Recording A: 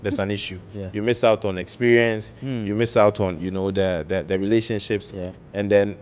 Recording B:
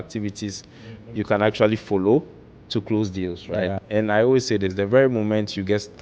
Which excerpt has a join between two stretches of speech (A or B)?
B